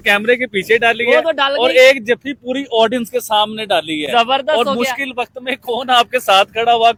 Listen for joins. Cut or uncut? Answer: uncut